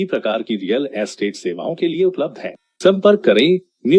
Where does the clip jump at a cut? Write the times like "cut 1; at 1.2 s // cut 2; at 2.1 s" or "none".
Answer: none